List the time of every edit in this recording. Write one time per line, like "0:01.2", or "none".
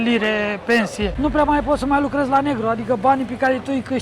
0:01.1